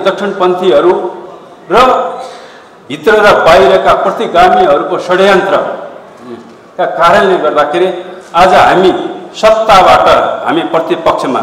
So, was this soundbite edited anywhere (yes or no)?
no